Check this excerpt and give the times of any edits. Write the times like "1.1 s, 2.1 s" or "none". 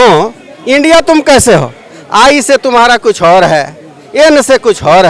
none